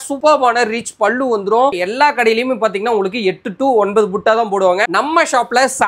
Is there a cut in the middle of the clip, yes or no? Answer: yes